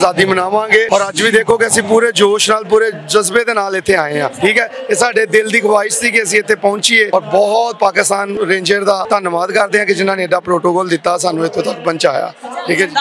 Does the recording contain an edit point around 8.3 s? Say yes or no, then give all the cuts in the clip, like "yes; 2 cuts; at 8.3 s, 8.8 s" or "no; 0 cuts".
yes; 5 cuts; at 0.9 s, 4.3 s, 7.1 s, 8.3 s, 9.0 s